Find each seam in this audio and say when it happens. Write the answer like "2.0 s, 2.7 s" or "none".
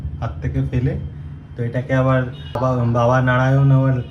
2.6 s